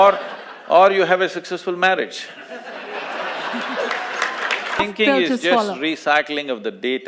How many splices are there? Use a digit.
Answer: 1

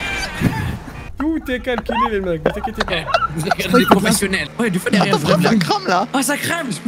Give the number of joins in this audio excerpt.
2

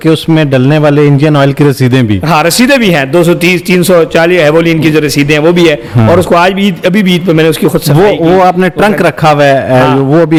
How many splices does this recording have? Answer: 0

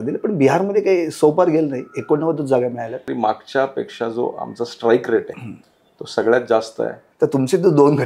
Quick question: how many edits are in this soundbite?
2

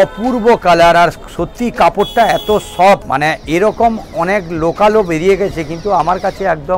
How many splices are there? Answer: 1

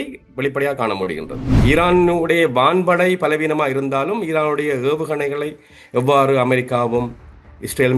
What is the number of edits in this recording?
1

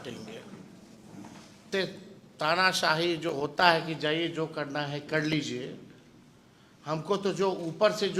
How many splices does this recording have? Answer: 1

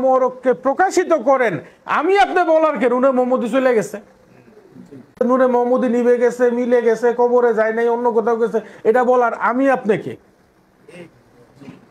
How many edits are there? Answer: 1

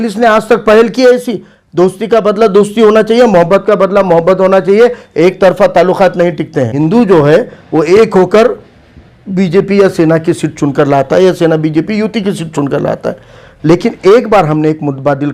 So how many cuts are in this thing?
1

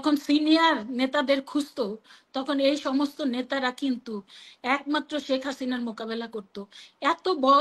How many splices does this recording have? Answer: 0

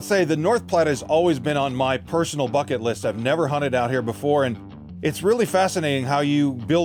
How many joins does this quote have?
0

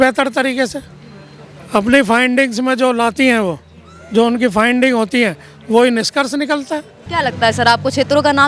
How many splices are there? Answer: 1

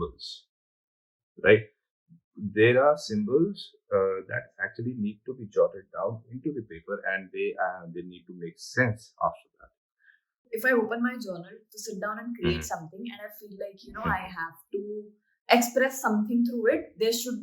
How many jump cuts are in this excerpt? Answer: 1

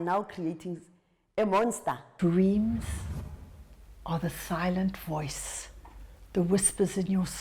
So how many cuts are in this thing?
1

